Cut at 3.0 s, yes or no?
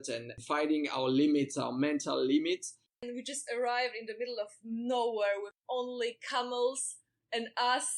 yes